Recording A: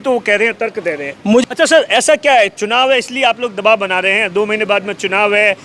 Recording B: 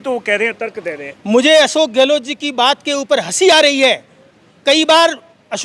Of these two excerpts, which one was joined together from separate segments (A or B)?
A